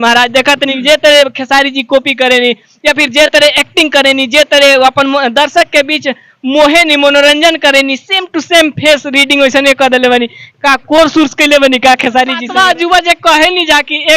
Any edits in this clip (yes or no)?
yes